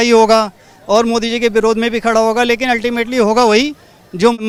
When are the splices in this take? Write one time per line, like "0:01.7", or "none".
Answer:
none

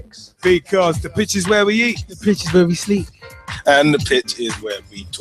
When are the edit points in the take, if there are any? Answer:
0:04.3

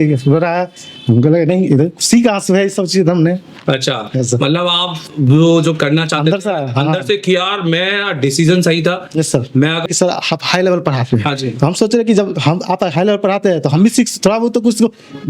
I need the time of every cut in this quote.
0:09.8

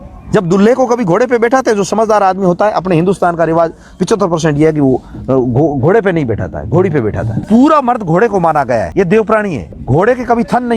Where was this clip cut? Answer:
0:07.4
0:08.9
0:09.7

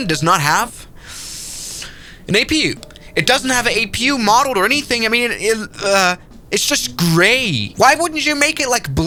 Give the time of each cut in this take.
none

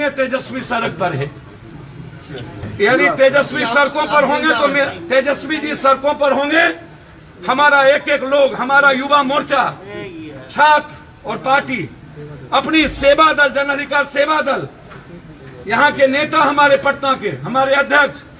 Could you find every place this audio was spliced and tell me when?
0:02.7

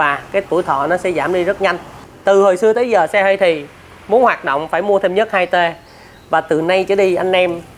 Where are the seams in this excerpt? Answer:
0:01.9

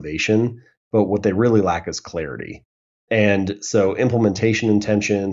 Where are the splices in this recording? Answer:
none

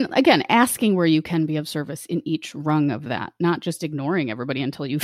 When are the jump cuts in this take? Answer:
none

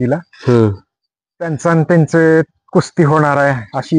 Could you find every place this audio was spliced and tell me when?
none

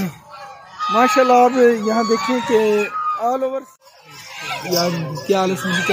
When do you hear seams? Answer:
0:03.8

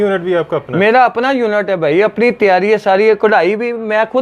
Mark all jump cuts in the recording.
none

